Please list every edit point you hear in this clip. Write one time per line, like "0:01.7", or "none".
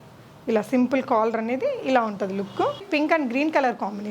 0:02.9